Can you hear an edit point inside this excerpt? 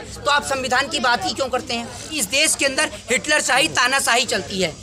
yes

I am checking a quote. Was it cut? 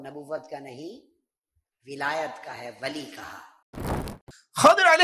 yes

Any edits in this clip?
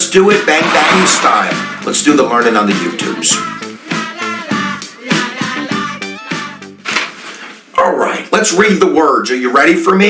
no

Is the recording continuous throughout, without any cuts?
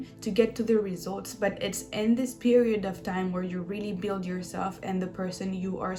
yes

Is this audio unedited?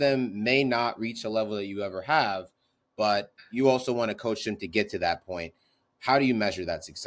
yes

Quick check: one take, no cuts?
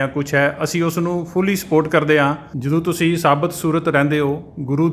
no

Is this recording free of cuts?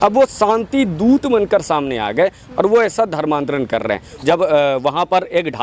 yes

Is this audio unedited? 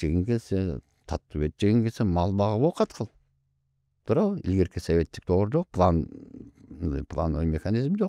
yes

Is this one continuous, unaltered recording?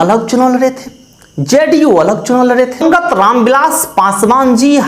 no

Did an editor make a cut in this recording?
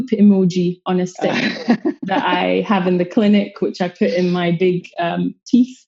no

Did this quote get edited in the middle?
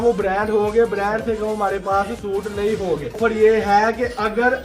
yes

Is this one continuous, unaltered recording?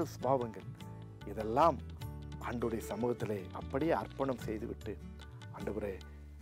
no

